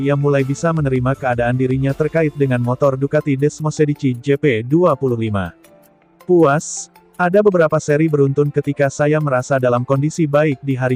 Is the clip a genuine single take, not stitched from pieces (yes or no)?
yes